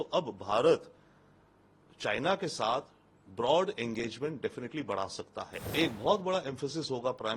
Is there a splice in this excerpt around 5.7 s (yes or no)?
yes